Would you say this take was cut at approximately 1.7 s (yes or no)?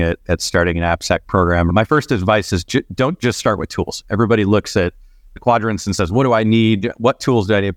yes